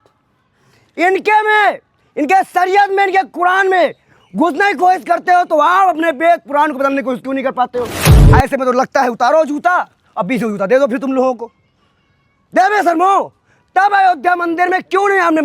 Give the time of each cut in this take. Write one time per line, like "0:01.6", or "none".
0:08.0